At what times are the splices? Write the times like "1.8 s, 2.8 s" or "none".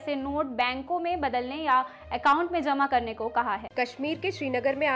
none